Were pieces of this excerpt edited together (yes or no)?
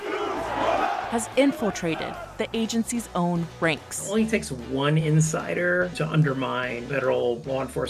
yes